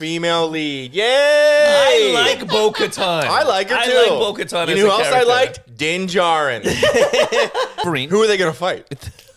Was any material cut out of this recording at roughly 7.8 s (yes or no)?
yes